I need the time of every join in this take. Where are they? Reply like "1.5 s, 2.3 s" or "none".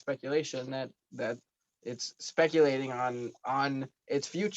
none